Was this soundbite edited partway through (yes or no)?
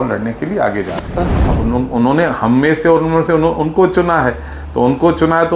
yes